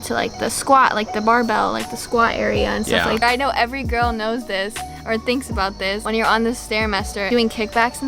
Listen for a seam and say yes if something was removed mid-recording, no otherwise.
yes